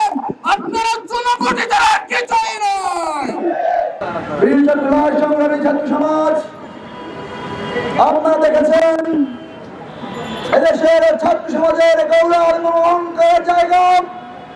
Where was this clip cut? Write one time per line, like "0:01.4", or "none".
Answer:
0:04.0